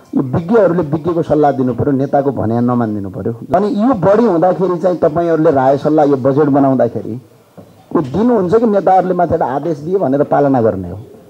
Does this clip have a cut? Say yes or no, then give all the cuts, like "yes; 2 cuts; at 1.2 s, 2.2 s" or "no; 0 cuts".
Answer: yes; 1 cut; at 3.5 s